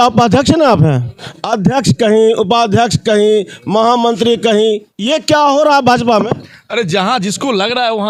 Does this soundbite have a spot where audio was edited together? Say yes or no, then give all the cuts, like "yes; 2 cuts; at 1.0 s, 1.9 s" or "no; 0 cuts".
no; 0 cuts